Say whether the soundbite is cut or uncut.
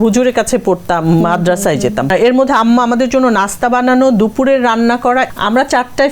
cut